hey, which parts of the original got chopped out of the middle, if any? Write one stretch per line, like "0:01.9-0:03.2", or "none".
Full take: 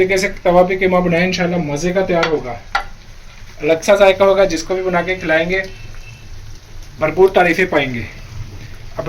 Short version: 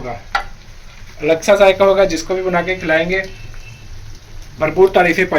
none